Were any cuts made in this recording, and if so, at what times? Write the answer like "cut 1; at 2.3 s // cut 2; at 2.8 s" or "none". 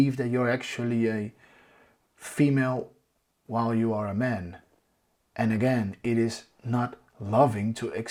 none